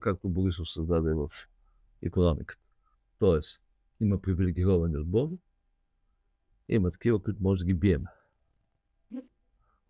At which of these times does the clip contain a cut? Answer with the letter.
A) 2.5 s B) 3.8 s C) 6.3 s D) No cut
D